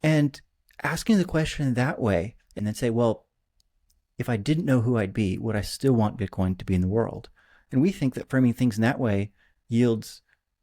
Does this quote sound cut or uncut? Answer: cut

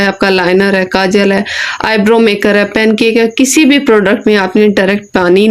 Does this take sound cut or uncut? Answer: uncut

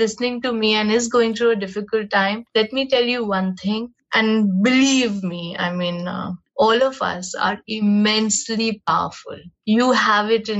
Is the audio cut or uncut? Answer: cut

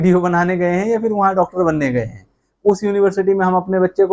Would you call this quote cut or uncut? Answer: uncut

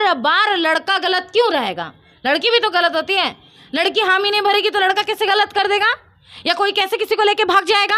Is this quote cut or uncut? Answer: uncut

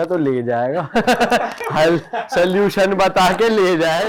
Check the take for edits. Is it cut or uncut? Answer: uncut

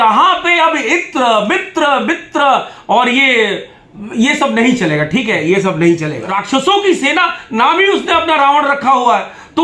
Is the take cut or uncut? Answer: cut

